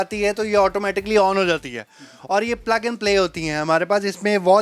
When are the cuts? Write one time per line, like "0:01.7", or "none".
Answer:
none